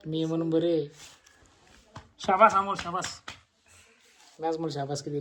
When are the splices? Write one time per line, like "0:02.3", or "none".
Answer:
none